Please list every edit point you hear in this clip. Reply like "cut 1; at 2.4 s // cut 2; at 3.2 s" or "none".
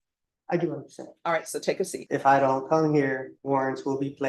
cut 1; at 2.0 s // cut 2; at 3.3 s